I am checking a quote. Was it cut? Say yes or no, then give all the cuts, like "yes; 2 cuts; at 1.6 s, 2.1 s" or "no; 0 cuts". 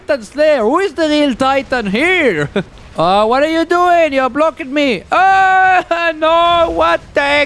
yes; 1 cut; at 2.8 s